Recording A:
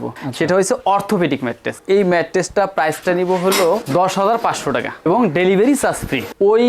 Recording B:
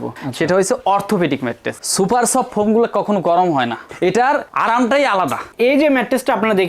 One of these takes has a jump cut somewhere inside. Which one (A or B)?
B